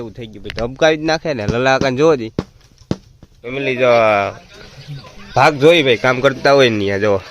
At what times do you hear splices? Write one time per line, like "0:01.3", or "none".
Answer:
0:03.2